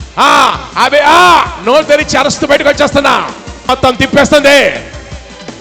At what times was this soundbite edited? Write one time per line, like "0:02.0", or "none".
0:03.7